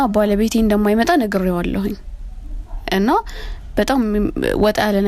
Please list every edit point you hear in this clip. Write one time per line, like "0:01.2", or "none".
none